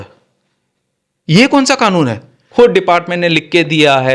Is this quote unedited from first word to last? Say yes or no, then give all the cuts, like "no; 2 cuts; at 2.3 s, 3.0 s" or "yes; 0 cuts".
no; 1 cut; at 2.5 s